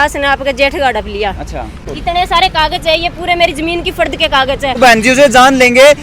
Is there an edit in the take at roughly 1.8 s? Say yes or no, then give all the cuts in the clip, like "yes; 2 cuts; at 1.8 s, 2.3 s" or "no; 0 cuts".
yes; 2 cuts; at 1.8 s, 4.8 s